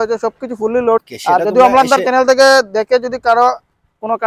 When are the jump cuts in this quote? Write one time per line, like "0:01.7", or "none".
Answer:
0:01.0